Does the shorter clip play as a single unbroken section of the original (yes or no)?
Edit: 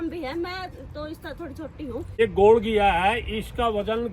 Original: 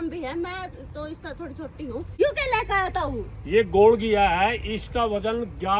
no